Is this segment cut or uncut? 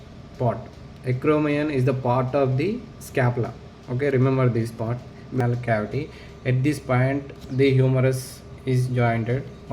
cut